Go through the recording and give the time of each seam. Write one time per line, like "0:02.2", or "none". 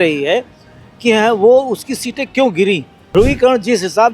0:03.1